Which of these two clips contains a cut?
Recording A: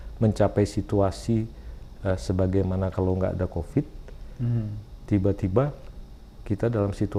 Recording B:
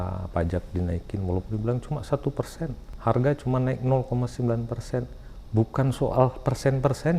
B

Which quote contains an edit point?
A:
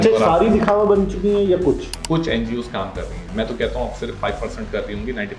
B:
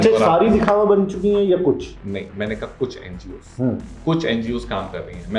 A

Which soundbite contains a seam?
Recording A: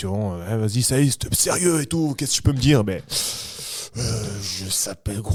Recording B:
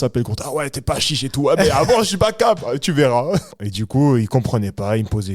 B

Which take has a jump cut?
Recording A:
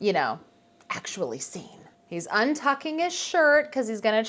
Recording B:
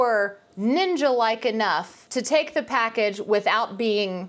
A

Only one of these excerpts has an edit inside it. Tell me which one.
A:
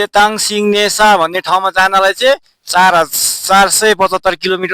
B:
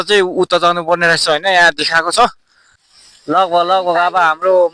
B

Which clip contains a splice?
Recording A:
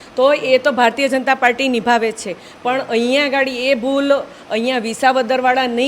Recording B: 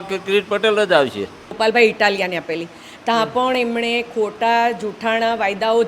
B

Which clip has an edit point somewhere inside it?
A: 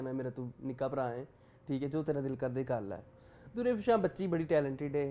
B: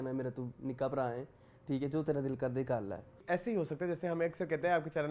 B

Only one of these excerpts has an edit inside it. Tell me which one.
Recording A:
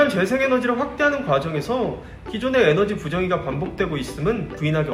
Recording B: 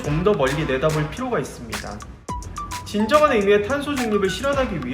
B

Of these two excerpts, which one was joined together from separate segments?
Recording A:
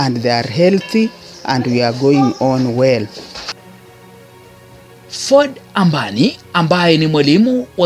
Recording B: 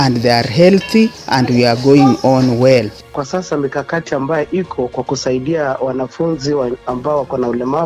B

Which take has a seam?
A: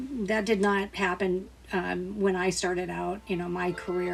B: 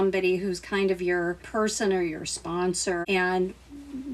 B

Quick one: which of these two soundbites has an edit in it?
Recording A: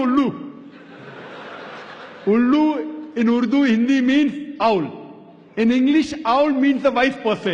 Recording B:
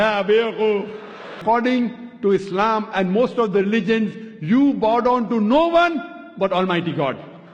B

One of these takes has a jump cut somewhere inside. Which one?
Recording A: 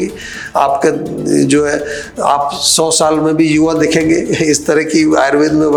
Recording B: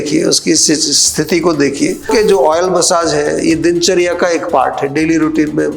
B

